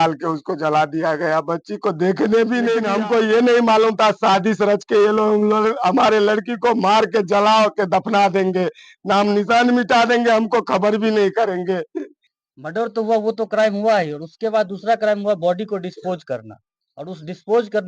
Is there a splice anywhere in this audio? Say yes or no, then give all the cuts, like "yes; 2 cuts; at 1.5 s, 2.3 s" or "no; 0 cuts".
yes; 2 cuts; at 2.8 s, 12.2 s